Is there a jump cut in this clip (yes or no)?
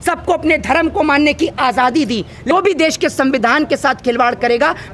yes